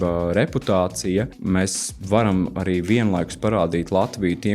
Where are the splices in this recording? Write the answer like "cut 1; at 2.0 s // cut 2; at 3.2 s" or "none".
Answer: cut 1; at 1.3 s